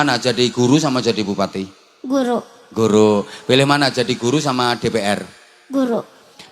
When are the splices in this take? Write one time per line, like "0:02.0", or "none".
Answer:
none